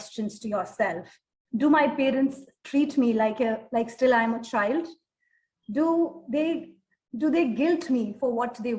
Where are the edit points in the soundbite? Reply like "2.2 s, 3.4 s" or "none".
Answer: none